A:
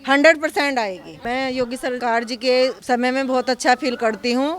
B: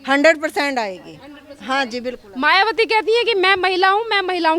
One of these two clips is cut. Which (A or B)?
A